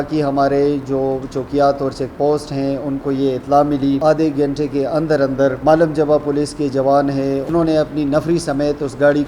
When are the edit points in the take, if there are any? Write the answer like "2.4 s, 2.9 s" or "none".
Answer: 4.0 s, 7.5 s